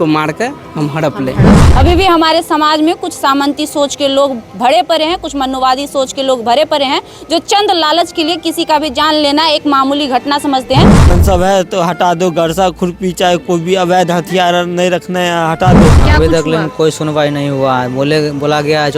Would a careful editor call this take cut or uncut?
cut